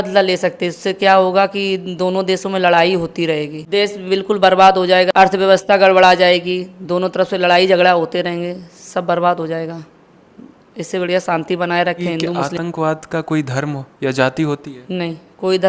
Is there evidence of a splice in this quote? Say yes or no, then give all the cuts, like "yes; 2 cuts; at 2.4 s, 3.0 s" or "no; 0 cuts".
yes; 3 cuts; at 3.6 s, 5.1 s, 12.4 s